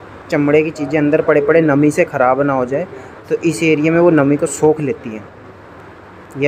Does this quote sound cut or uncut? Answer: uncut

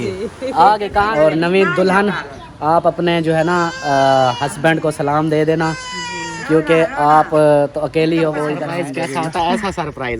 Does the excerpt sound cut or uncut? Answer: cut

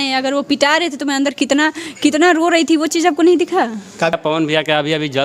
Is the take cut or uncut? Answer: cut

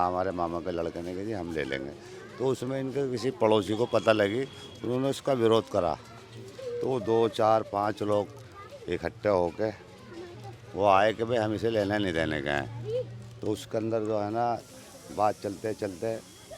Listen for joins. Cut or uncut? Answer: uncut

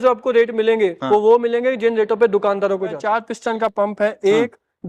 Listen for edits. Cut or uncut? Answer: cut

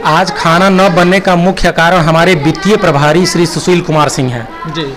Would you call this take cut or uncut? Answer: uncut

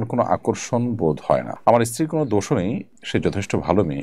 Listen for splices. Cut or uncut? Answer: cut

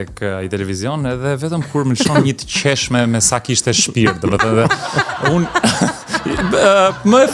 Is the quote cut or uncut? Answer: uncut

